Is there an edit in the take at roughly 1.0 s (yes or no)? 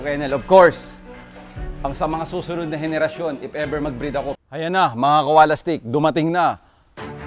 no